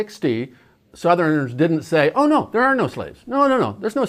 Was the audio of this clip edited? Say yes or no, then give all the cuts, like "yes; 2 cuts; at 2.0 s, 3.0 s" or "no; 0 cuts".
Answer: no; 0 cuts